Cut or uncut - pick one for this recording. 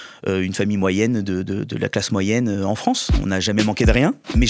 cut